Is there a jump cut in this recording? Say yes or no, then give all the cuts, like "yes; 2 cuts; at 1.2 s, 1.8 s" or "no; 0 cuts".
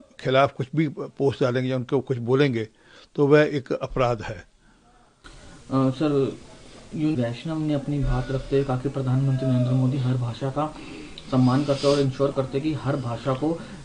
no; 0 cuts